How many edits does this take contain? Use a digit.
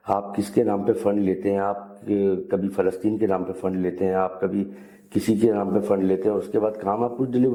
0